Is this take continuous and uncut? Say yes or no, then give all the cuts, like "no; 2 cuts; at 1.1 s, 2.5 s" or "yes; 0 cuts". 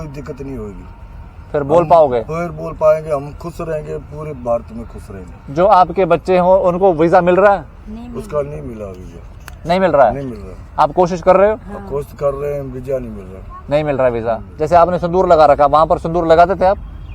no; 1 cut; at 14.5 s